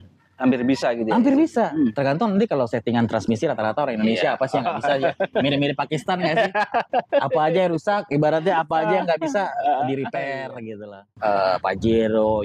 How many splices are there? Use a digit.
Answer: 1